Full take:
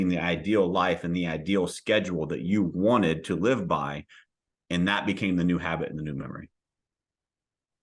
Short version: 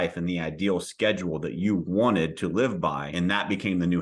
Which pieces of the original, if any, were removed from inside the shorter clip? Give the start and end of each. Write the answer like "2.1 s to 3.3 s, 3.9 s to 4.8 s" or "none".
3.9 s to 4.6 s